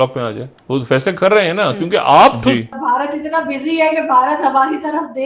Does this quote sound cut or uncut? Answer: cut